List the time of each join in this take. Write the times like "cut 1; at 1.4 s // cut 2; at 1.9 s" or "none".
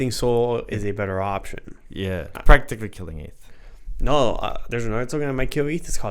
cut 1; at 2.3 s